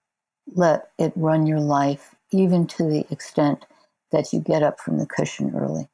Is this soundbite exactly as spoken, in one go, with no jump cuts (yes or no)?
yes